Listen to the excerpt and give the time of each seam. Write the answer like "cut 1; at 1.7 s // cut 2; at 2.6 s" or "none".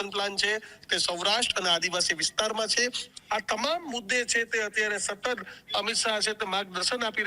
cut 1; at 3.1 s